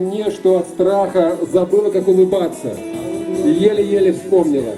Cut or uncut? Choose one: uncut